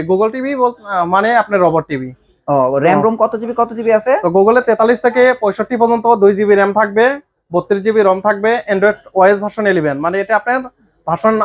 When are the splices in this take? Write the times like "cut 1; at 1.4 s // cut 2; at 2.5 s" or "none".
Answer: none